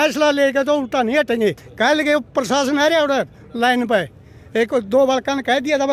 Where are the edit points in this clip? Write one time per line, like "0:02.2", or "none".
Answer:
0:01.7